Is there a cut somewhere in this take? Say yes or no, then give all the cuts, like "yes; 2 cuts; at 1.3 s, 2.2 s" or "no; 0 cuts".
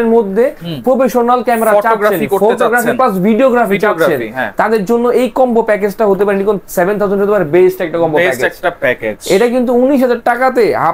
no; 0 cuts